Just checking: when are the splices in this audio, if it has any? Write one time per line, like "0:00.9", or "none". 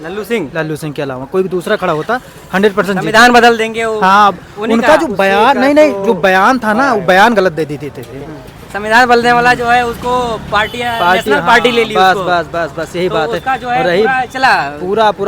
none

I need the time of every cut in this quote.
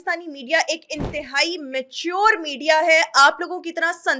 none

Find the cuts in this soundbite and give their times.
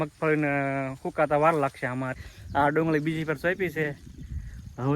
0:02.1

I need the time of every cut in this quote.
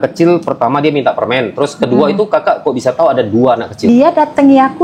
0:03.9

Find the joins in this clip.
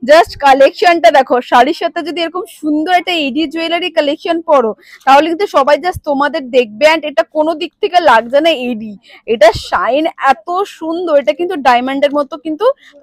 none

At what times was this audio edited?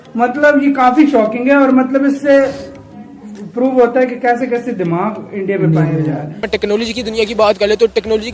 0:06.4

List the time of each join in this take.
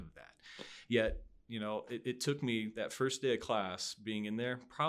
none

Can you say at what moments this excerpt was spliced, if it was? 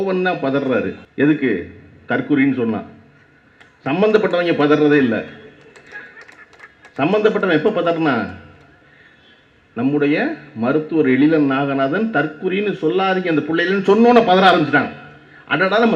0:01.0

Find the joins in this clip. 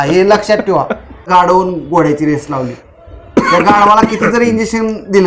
0:01.2

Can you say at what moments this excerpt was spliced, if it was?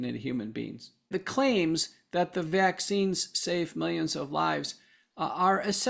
0:01.1

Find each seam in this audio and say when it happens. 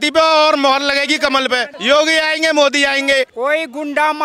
0:01.7
0:03.3

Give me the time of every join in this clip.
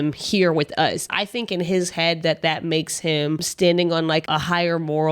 0:01.1
0:03.5
0:04.2

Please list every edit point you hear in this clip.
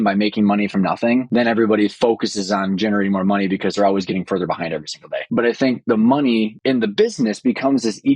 0:01.3
0:05.1
0:06.6

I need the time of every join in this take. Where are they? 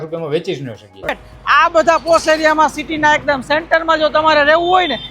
0:01.1

